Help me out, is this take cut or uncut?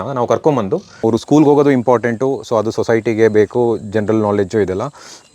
cut